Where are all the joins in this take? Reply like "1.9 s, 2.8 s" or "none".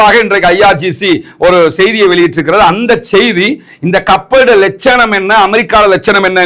none